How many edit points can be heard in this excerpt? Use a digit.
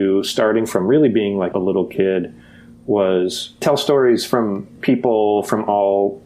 2